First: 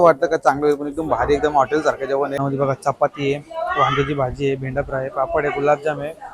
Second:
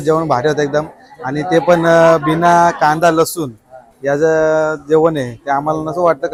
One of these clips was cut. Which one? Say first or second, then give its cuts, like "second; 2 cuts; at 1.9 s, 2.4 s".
first; 1 cut; at 2.4 s